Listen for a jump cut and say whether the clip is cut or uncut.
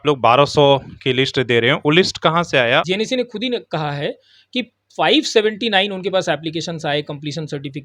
cut